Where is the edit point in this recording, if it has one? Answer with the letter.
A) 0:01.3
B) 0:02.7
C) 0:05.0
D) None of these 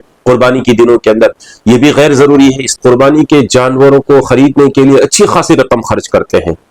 B